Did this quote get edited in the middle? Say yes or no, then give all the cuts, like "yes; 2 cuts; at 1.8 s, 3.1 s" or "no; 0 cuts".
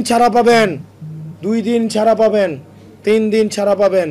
no; 0 cuts